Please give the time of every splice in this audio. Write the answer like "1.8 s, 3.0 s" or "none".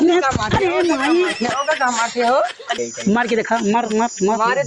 2.7 s

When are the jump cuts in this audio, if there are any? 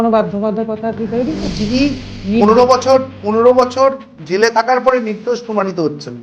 1.4 s

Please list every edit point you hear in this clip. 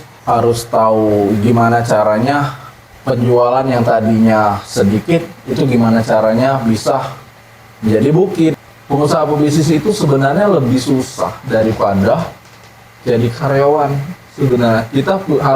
8.7 s

